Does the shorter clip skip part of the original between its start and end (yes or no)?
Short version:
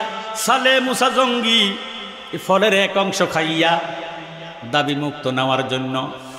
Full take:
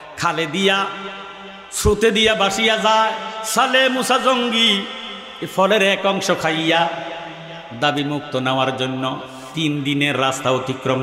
no